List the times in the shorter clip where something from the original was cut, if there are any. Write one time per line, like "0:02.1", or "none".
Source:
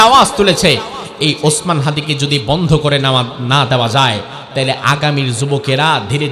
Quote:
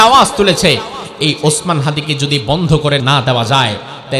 0:03.0